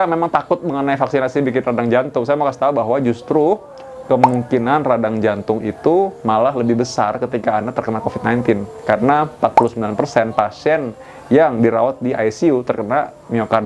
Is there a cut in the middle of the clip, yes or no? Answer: no